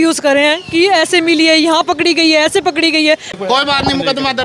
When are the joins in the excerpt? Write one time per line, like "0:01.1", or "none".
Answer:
0:03.3